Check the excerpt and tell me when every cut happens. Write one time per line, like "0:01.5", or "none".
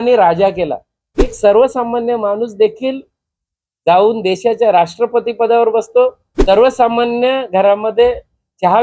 0:01.3
0:06.3